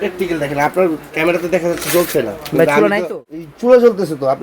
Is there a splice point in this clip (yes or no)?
yes